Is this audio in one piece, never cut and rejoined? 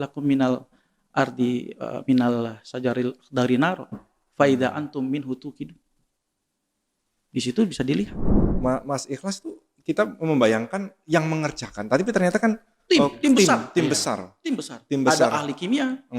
no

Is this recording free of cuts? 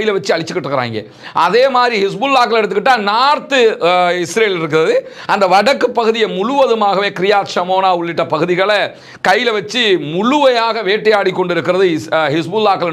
yes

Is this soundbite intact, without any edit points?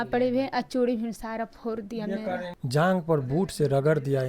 no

